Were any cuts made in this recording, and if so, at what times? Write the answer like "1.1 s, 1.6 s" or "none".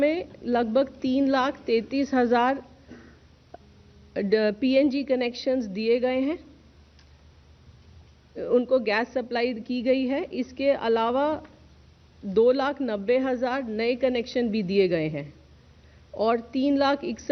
none